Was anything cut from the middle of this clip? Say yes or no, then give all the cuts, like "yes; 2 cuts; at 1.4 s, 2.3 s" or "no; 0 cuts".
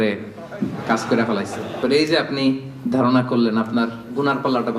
yes; 1 cut; at 1.8 s